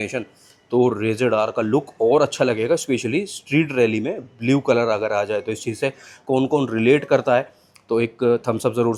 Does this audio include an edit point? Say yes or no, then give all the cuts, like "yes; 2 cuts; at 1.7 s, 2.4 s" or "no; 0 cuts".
no; 0 cuts